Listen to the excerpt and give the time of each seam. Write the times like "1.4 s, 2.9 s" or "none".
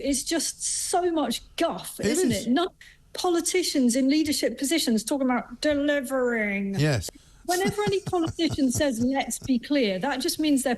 2.9 s, 7.0 s